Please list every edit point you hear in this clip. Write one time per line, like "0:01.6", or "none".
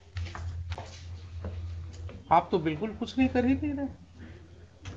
none